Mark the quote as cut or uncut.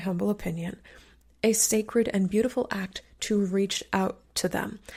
uncut